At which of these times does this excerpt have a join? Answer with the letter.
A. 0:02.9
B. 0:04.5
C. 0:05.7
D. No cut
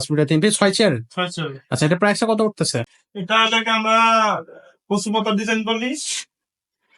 A